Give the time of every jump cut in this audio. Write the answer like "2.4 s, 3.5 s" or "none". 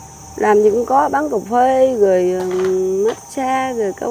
none